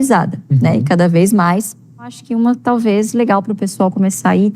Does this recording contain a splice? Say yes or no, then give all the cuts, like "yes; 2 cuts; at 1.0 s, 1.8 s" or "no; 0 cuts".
yes; 1 cut; at 2.2 s